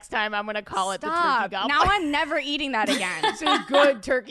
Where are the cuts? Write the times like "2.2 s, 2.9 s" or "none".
3.4 s